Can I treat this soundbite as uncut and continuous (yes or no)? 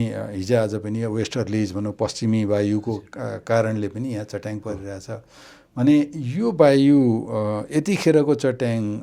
yes